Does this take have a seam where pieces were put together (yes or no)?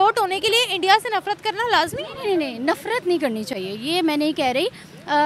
no